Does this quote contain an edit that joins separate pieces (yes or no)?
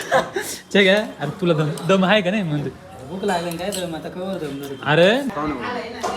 yes